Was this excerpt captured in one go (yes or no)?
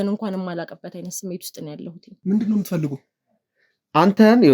no